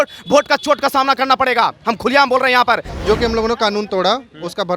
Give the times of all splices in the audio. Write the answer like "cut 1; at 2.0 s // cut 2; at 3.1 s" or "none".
cut 1; at 2.9 s